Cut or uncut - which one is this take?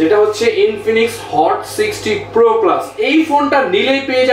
cut